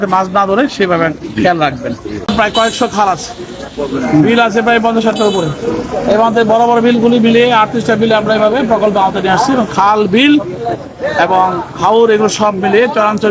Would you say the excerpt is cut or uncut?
cut